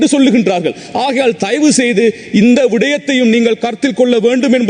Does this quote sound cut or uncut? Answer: uncut